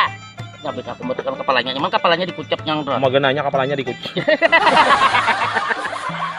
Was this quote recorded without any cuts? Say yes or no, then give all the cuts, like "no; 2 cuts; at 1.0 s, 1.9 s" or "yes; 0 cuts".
no; 1 cut; at 4.9 s